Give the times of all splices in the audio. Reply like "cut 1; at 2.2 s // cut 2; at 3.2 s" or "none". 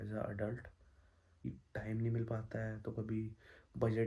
cut 1; at 1.4 s